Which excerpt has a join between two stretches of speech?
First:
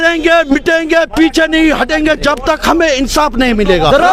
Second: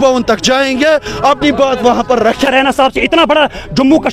second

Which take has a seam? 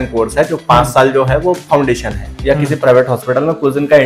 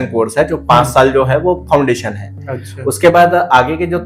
first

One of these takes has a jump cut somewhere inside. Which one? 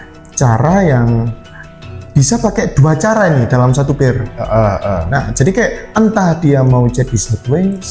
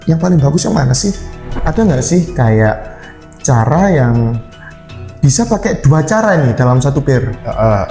second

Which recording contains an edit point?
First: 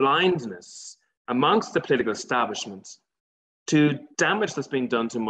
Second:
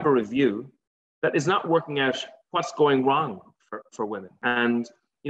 second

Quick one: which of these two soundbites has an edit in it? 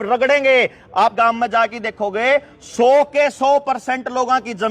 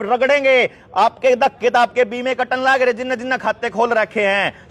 first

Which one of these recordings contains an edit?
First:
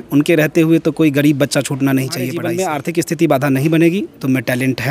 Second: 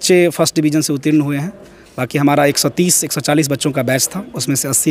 first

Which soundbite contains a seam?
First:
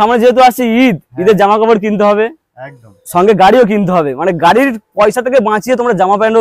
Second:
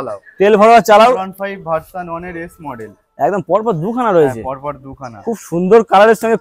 second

